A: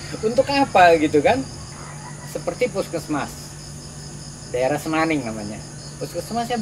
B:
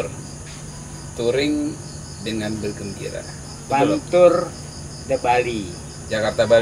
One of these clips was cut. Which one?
A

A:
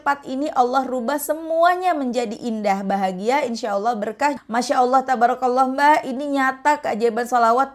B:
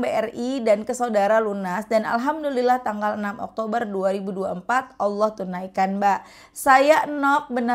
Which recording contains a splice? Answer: A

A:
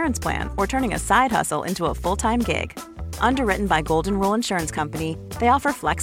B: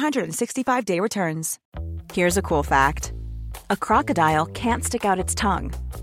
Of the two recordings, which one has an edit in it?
B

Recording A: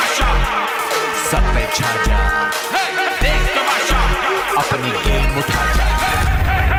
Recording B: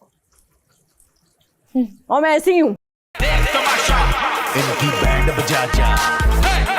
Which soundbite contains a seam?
B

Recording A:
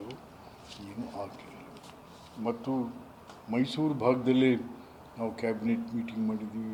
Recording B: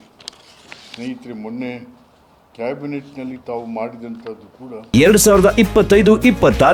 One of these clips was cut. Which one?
B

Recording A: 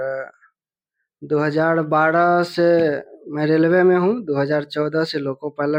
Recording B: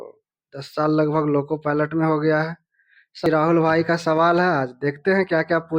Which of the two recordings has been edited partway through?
B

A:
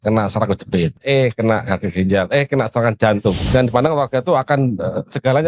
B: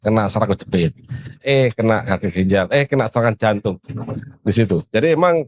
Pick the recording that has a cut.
A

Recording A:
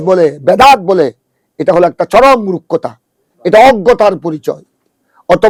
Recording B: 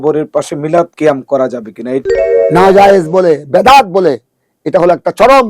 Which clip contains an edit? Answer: B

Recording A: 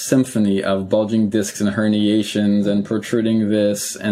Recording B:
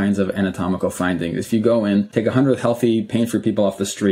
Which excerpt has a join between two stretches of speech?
B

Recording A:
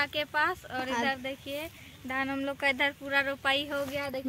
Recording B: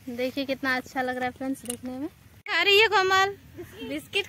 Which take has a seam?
B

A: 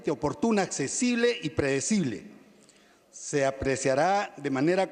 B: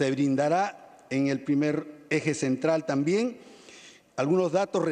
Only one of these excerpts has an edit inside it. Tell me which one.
A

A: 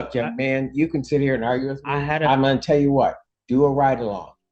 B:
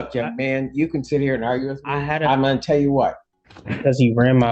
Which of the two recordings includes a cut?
B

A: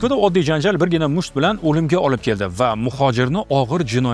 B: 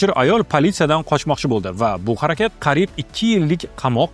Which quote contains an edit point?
B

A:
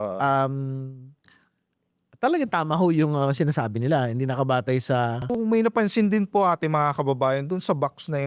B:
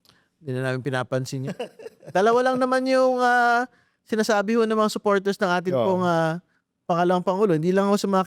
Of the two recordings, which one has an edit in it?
A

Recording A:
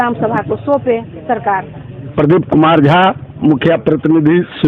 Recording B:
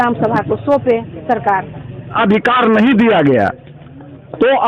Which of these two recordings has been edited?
B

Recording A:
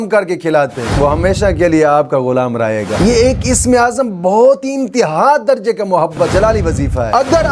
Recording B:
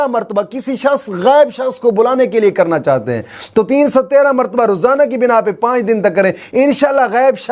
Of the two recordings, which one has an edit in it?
A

